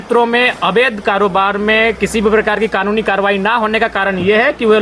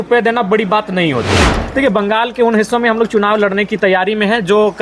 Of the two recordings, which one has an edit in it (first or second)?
second